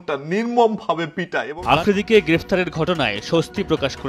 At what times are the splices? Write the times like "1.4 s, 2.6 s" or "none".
1.8 s